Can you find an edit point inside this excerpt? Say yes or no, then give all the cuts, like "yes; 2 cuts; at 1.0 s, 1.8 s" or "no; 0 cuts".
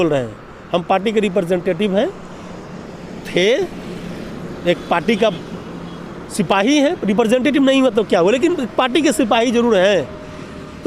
no; 0 cuts